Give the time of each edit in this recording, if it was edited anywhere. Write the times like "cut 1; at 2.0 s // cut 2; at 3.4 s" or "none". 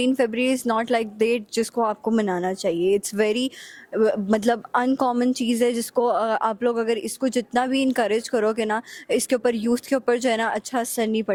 none

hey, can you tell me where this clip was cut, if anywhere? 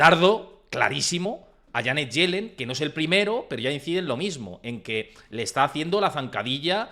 none

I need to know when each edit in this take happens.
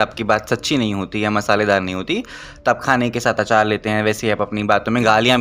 none

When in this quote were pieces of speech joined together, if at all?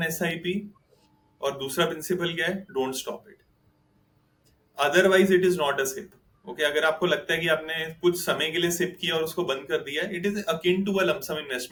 none

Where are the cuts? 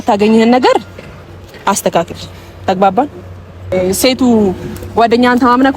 cut 1; at 3.7 s

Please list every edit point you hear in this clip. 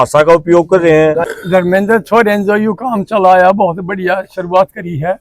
cut 1; at 1.3 s

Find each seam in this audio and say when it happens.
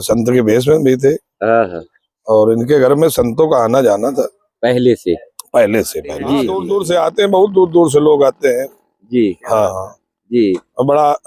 cut 1; at 6.5 s

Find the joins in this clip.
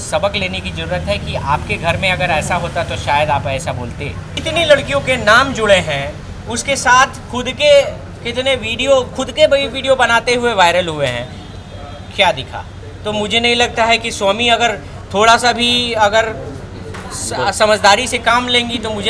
cut 1; at 4.3 s

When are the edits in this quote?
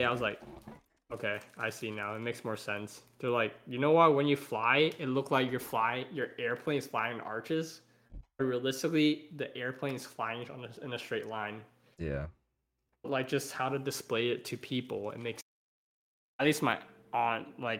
cut 1; at 15.4 s

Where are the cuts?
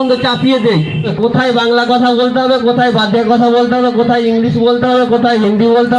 cut 1; at 1.1 s

